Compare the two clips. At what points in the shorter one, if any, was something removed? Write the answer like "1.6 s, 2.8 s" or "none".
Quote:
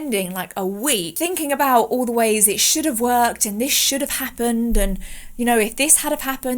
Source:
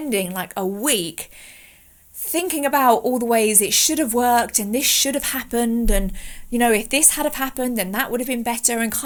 1.1 s